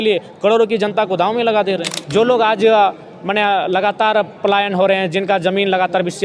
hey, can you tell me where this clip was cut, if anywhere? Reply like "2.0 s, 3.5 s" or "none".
1.9 s